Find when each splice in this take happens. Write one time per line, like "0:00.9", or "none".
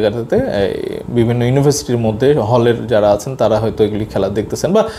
none